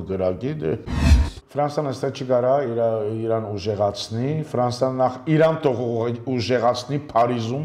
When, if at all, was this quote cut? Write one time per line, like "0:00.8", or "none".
0:01.1